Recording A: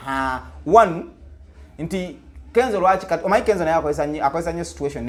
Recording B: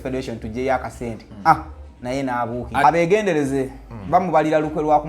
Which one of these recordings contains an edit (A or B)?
B